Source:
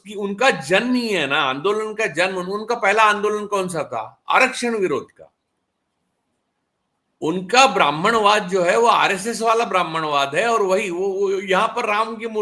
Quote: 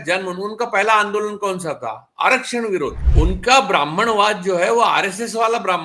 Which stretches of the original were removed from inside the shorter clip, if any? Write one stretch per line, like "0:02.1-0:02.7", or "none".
0:05.1-0:07.1